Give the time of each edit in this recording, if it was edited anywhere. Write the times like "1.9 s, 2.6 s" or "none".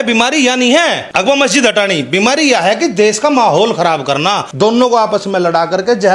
1.0 s, 4.5 s